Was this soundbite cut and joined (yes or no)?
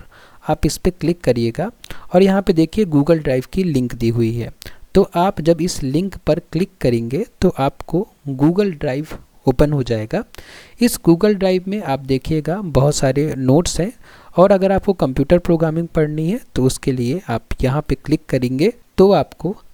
no